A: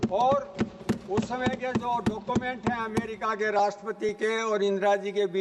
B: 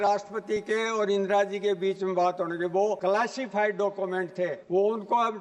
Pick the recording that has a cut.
B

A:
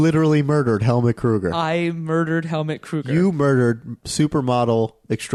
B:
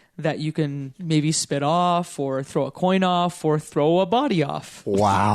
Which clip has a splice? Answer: B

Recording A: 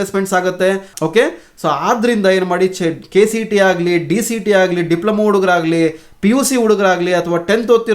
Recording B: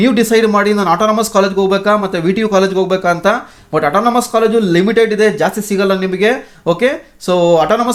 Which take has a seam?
A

